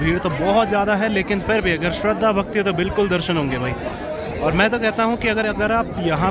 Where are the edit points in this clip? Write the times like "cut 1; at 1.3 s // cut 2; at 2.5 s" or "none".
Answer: none